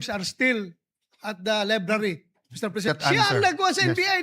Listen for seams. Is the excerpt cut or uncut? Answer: cut